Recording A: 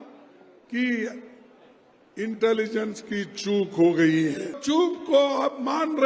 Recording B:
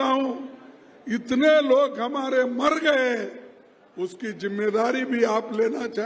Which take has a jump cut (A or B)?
A